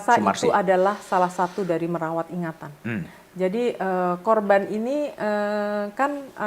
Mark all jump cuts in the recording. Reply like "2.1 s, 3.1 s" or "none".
none